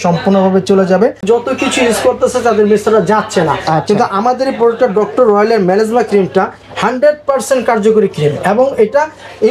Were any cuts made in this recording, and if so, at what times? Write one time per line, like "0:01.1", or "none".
0:01.2